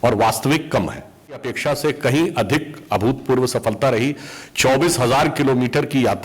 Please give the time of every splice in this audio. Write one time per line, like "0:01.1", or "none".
0:01.5

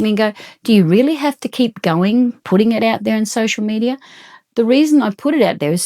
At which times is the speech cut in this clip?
none

